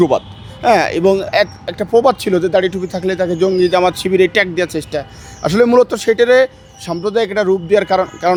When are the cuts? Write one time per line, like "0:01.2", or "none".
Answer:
none